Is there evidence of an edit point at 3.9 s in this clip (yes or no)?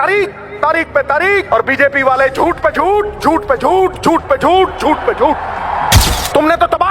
no